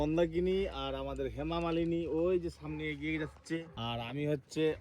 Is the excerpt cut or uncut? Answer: cut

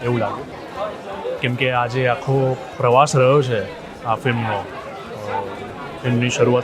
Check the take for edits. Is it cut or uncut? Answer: uncut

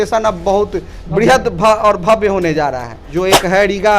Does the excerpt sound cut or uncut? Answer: cut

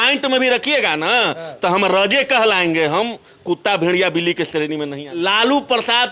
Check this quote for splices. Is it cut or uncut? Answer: cut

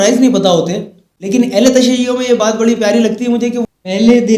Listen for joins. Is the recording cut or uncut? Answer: cut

